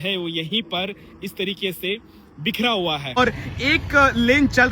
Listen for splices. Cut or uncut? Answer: cut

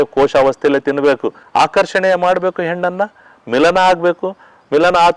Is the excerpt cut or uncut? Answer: cut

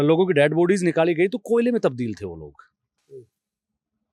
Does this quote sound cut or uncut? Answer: uncut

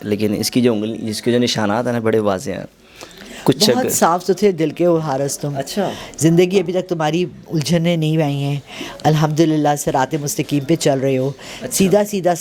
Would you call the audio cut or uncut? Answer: uncut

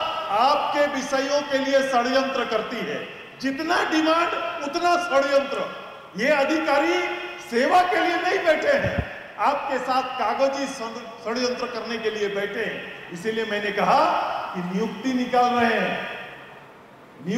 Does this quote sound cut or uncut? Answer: uncut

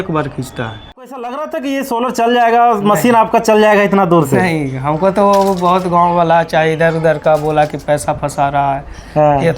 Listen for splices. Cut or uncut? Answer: cut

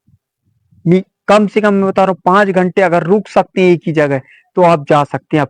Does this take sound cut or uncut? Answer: uncut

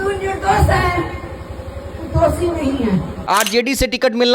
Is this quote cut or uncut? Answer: cut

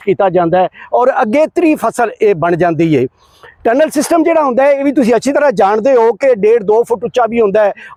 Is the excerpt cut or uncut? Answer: uncut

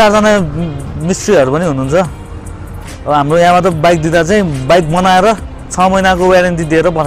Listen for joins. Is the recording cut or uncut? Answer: uncut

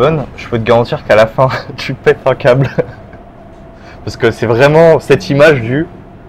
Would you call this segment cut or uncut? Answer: uncut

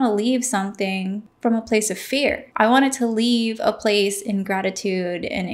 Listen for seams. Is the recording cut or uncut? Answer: cut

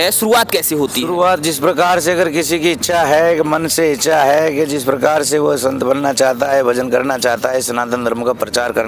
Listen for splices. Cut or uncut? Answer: uncut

